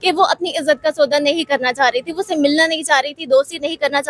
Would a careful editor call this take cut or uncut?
uncut